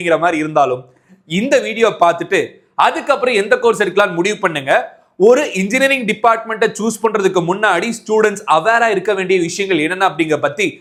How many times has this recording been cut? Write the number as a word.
zero